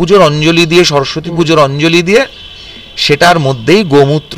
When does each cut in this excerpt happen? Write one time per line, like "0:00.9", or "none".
none